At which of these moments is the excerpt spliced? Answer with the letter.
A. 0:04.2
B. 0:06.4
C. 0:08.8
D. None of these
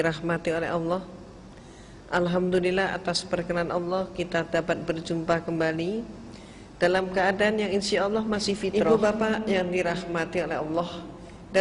C